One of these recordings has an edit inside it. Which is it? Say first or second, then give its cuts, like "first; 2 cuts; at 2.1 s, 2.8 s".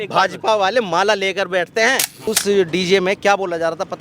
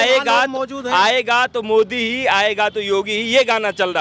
first; 1 cut; at 2.3 s